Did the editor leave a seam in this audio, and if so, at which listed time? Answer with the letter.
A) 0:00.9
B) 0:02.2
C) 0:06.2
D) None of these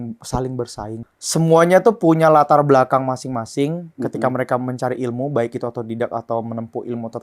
A